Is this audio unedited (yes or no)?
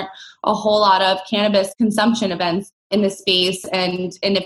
no